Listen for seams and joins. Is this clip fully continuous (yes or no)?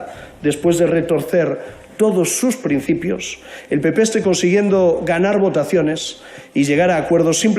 yes